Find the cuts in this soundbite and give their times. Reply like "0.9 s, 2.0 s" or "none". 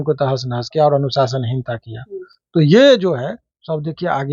none